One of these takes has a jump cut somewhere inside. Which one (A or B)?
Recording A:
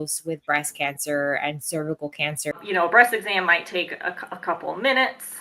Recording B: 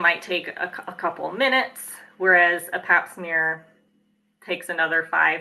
A